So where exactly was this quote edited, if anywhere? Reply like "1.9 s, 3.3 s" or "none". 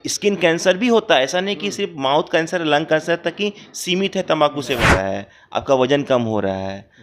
4.9 s